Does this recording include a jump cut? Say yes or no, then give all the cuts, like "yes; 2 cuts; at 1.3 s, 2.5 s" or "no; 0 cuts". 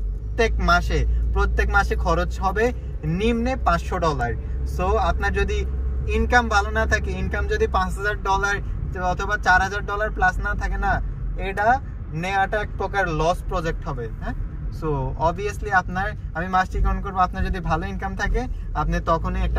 no; 0 cuts